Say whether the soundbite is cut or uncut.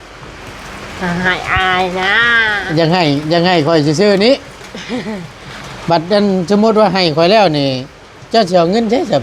uncut